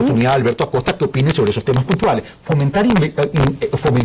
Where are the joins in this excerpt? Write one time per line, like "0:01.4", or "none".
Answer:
none